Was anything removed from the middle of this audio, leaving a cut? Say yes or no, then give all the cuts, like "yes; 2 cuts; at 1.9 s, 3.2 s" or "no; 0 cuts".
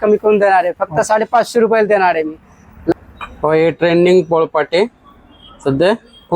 no; 0 cuts